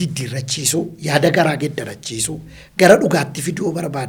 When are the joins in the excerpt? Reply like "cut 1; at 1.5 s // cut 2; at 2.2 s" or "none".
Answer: none